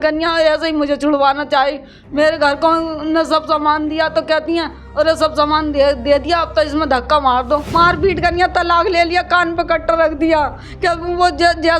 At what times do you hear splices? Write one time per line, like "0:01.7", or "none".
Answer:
0:07.7